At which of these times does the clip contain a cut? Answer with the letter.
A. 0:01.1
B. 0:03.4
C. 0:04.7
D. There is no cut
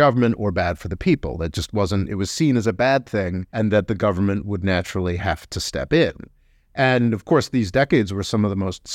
B